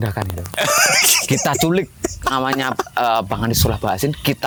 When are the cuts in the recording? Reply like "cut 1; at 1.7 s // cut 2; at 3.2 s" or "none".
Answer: none